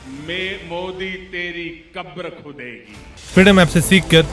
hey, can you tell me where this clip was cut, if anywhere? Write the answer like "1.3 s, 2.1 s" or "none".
3.2 s